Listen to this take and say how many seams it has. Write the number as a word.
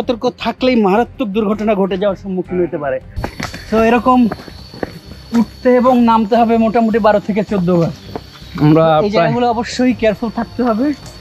one